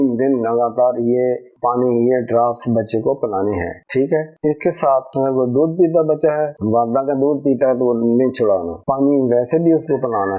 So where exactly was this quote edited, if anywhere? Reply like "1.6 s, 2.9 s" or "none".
8.7 s